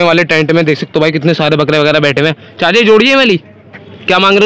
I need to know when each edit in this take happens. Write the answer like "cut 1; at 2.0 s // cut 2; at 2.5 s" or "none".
none